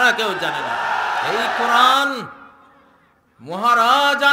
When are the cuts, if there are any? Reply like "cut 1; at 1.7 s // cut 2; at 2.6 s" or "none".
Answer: cut 1; at 1.7 s